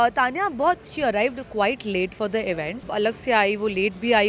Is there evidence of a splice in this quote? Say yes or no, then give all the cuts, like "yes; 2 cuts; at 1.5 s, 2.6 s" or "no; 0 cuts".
yes; 1 cut; at 2.9 s